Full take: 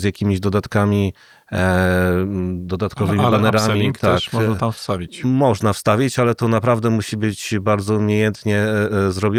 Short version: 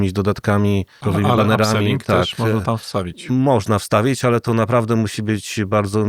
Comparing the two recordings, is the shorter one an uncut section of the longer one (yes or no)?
no